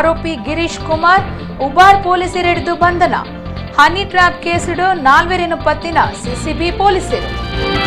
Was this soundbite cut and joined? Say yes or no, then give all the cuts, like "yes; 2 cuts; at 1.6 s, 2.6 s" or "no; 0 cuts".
no; 0 cuts